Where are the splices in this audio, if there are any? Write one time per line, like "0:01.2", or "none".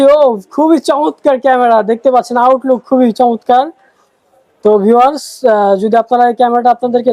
none